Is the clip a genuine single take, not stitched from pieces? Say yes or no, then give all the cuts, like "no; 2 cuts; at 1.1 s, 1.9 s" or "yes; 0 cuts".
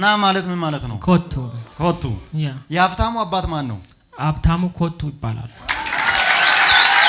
yes; 0 cuts